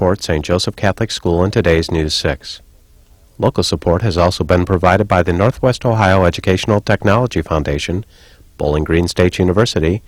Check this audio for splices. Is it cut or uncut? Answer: uncut